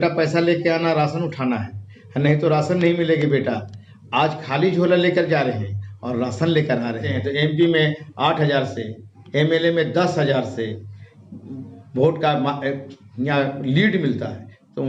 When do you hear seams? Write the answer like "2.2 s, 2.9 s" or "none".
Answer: 7.2 s